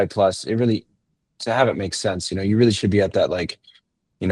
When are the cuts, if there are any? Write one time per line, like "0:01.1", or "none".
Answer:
none